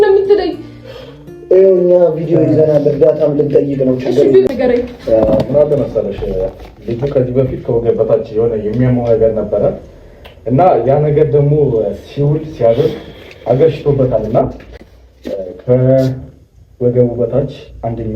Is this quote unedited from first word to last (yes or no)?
no